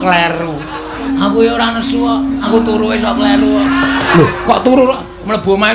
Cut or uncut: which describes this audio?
cut